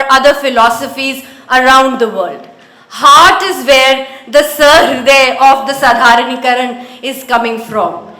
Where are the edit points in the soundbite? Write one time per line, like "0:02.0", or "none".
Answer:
none